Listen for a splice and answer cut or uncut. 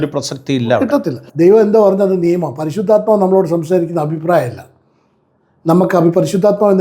cut